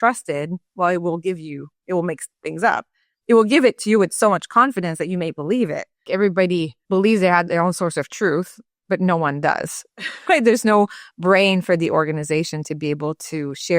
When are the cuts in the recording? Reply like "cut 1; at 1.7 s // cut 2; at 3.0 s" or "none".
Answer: cut 1; at 6.0 s // cut 2; at 6.8 s